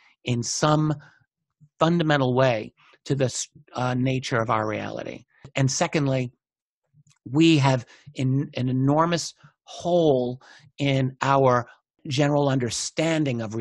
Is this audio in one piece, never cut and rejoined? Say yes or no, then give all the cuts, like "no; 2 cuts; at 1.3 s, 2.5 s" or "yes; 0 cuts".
no; 2 cuts; at 5.5 s, 12.0 s